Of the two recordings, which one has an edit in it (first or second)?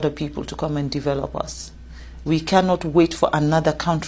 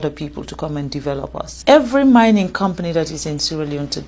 second